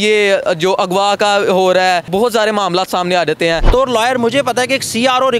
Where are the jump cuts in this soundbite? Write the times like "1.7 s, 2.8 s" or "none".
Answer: 2.1 s, 3.7 s